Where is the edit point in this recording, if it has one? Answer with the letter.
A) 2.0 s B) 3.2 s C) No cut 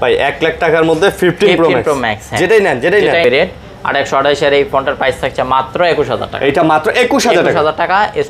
B